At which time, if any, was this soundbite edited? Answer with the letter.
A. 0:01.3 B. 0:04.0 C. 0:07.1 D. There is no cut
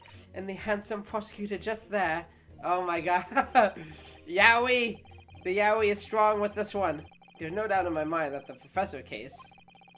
C